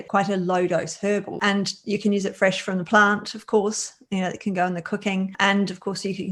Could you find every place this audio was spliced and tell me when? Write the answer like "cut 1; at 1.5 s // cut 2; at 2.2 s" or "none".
cut 1; at 1.4 s